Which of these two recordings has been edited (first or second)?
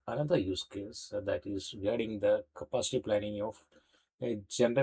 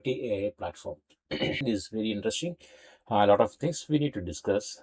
second